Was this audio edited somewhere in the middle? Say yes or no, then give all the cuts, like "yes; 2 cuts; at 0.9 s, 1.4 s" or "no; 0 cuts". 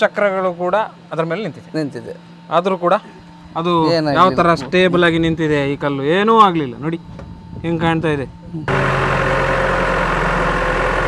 yes; 1 cut; at 8.7 s